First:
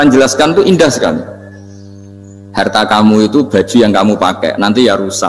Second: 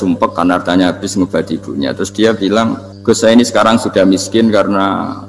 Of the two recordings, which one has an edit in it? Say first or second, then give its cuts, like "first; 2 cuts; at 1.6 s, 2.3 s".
second; 1 cut; at 2.9 s